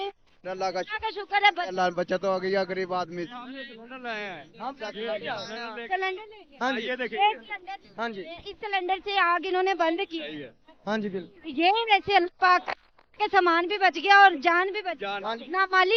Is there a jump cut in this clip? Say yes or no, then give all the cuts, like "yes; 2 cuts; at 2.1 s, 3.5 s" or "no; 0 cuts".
no; 0 cuts